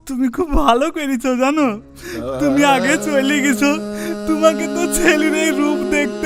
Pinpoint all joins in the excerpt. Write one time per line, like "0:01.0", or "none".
none